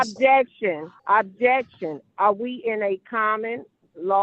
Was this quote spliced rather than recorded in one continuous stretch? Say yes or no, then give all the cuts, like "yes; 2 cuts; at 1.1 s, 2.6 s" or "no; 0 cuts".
yes; 1 cut; at 0.9 s